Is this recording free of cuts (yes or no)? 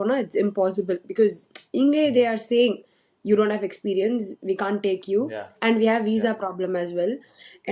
yes